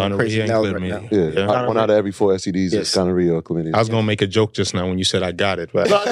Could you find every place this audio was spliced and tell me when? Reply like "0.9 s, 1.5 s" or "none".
none